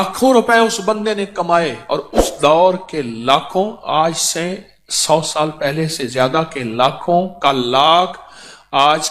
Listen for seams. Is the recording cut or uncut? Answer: uncut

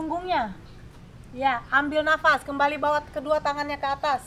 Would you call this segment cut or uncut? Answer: uncut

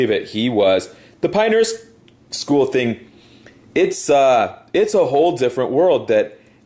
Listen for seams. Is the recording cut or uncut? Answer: cut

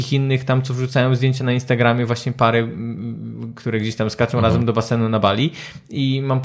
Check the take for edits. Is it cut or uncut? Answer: uncut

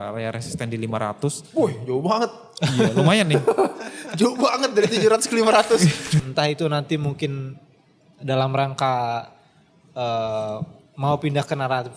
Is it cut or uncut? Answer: cut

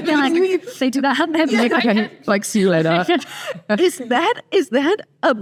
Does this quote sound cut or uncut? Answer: uncut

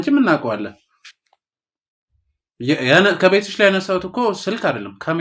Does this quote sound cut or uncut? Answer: uncut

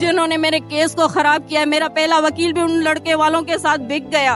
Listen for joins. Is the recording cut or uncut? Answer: uncut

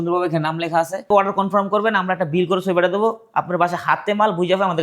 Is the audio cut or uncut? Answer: cut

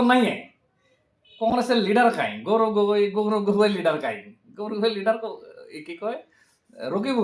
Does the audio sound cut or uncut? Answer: uncut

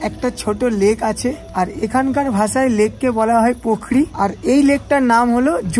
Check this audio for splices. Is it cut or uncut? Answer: cut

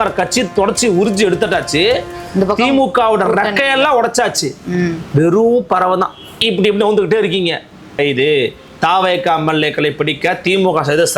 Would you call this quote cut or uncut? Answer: cut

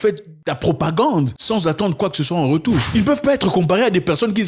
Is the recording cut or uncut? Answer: cut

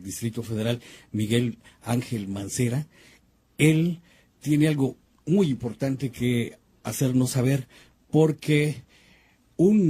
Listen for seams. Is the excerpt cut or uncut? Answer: cut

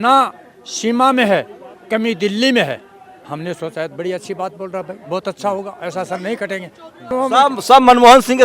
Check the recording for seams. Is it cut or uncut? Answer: cut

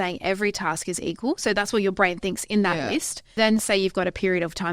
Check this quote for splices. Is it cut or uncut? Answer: cut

